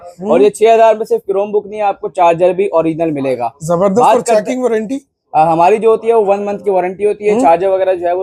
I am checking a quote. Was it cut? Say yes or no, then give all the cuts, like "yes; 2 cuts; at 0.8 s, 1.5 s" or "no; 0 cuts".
no; 0 cuts